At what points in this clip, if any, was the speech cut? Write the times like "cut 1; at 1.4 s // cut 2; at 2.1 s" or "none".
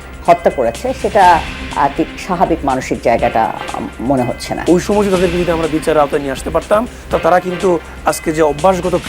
cut 1; at 4.5 s